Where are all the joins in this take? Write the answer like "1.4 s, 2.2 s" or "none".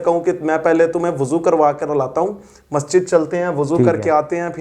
none

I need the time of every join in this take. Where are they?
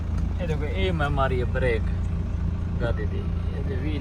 none

